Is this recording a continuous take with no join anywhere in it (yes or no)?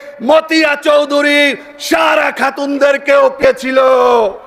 no